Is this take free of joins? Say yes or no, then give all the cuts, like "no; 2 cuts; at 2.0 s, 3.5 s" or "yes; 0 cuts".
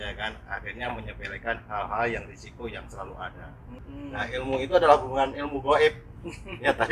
no; 1 cut; at 3.8 s